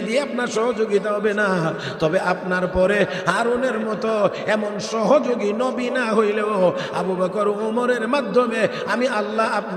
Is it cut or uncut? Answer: uncut